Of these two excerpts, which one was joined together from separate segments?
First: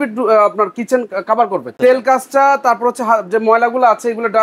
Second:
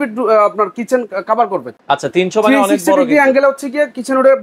first; 1 cut; at 1.8 s

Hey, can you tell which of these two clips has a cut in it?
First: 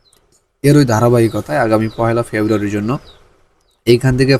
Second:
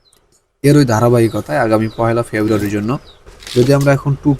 second; 1 cut; at 3.4 s

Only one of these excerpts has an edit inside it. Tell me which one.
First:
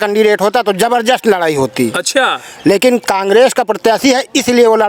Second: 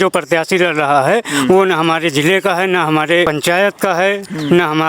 second; 1 cut; at 3.3 s

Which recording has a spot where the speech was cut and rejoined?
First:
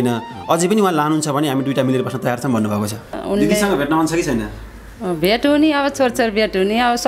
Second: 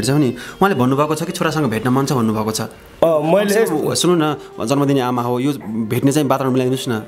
first; 1 cut; at 3.2 s

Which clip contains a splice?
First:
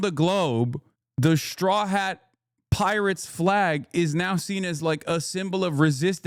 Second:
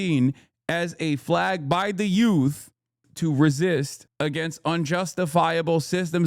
second; 2 cuts; at 3.1 s, 4.0 s

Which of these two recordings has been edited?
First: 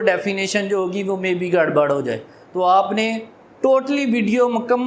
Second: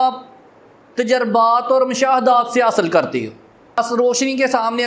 second; 1 cut; at 3.8 s

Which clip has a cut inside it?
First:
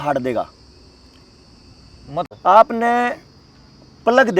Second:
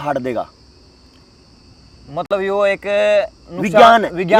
first; 1 cut; at 2.2 s

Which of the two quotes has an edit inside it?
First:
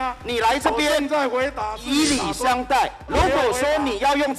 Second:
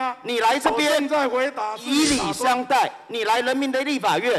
first; 1 cut; at 3.1 s

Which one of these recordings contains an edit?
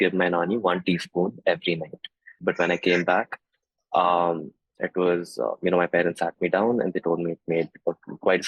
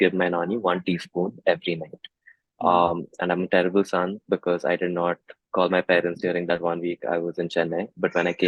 first; 1 cut; at 2.3 s

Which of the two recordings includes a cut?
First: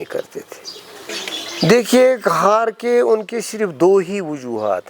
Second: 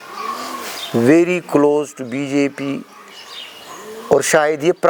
first; 1 cut; at 1.1 s

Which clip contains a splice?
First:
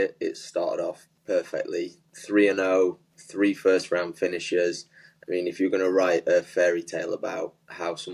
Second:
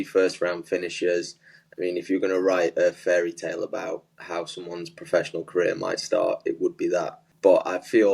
second; 1 cut; at 7.2 s

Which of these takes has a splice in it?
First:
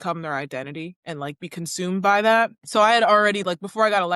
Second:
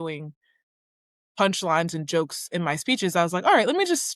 first; 2 cuts; at 1.0 s, 2.6 s

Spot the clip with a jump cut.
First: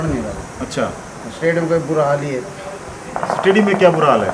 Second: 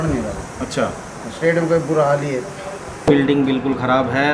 second; 1 cut; at 3.1 s

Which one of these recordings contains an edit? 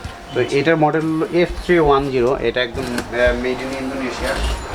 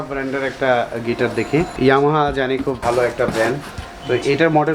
second; 2 cuts; at 1.7 s, 2.8 s

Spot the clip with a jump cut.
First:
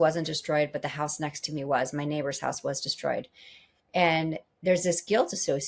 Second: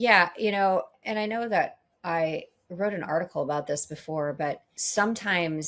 second; 2 cuts; at 1.0 s, 4.7 s

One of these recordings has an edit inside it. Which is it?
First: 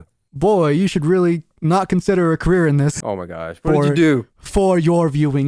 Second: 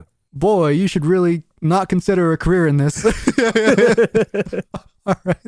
first; 1 cut; at 2.9 s

